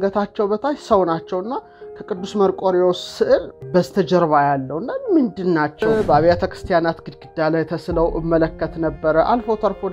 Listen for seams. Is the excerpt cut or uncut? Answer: cut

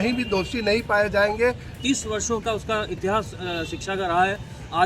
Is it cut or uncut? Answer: cut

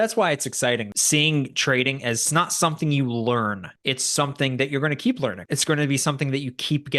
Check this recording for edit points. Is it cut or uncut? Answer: cut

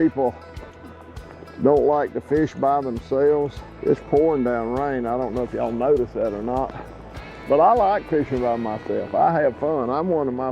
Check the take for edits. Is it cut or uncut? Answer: cut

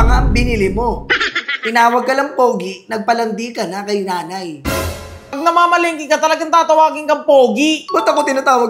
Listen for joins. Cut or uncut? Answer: cut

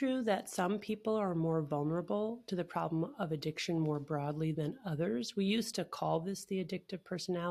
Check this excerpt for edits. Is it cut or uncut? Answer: uncut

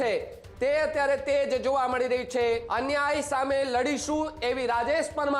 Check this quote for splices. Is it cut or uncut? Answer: cut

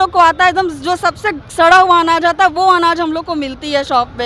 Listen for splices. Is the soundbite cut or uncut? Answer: uncut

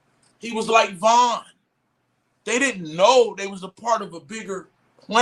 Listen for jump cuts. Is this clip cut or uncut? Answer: uncut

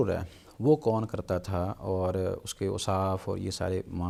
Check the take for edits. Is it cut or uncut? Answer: uncut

